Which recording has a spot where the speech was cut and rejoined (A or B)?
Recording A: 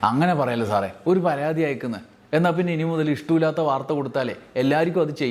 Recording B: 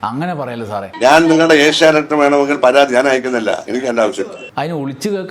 B